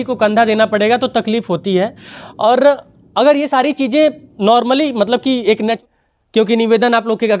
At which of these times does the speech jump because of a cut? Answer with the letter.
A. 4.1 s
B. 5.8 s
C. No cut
B